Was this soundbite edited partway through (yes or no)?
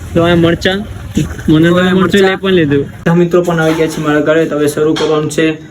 yes